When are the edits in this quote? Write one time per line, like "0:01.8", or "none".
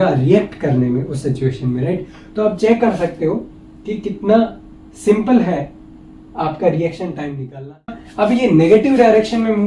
0:08.0